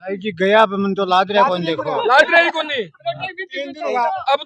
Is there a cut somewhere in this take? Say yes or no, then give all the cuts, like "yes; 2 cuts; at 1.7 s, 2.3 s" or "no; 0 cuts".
no; 0 cuts